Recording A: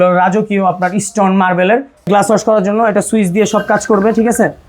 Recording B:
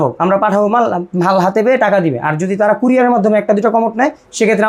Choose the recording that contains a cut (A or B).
A